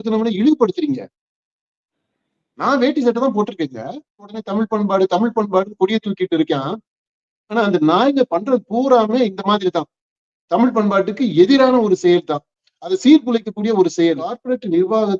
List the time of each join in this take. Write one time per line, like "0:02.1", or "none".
0:04.4
0:14.4